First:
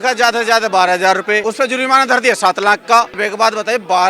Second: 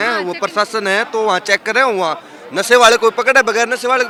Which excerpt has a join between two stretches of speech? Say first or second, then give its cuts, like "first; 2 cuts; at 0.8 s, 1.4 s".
first; 2 cuts; at 1.4 s, 3.2 s